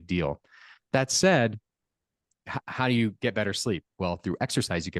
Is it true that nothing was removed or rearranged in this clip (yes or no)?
no